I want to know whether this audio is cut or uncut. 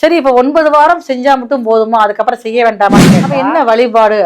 cut